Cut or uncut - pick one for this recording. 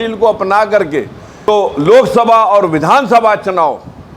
cut